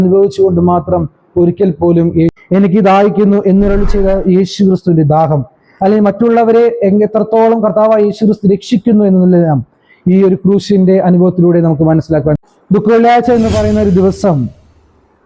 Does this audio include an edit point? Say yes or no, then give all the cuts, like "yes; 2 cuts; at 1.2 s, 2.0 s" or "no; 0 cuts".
yes; 2 cuts; at 2.4 s, 12.4 s